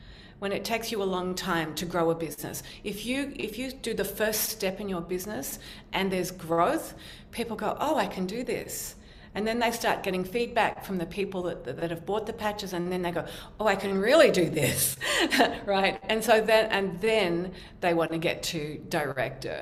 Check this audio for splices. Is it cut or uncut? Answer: uncut